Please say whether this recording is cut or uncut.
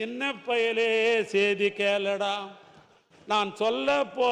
uncut